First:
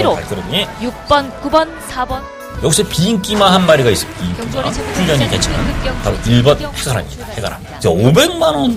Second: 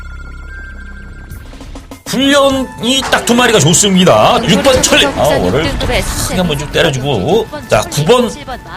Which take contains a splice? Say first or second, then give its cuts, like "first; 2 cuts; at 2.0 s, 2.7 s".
second; 1 cut; at 1.3 s